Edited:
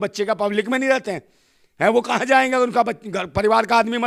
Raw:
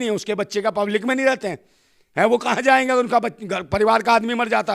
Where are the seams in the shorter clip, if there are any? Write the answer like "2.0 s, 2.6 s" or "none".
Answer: none